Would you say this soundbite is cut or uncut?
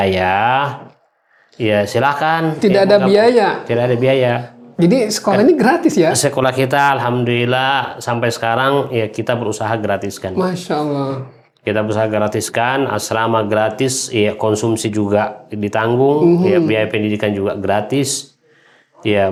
uncut